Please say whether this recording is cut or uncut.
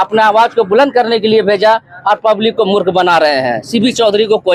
uncut